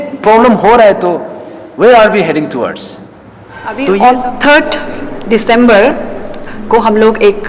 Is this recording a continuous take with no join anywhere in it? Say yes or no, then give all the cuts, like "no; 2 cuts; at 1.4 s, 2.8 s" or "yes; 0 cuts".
no; 1 cut; at 3.8 s